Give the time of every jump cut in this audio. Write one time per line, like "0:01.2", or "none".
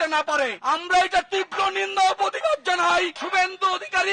0:03.2